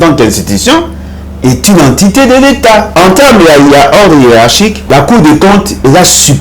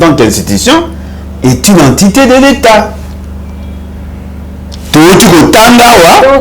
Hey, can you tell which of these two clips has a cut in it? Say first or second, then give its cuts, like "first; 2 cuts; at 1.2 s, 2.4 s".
first; 2 cuts; at 2.9 s, 4.8 s